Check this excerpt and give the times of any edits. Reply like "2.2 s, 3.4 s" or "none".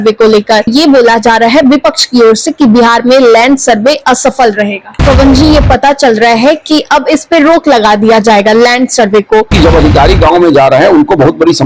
5.0 s, 9.5 s